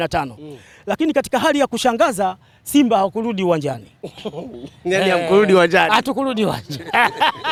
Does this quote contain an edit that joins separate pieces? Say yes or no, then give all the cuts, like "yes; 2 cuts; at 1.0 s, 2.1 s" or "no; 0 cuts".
no; 0 cuts